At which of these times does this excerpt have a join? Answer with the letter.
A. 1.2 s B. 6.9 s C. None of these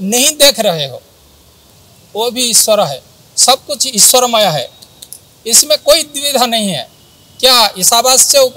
A